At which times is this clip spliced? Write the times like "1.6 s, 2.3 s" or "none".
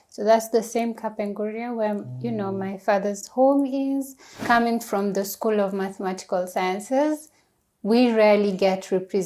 4.4 s